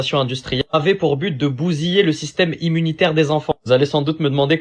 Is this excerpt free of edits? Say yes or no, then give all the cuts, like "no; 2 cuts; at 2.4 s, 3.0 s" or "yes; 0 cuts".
yes; 0 cuts